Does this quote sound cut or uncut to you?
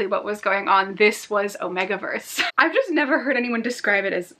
cut